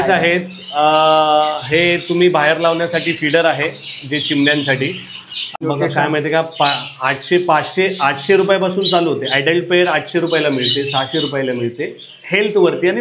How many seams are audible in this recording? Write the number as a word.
one